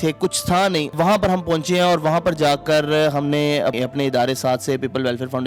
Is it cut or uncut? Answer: cut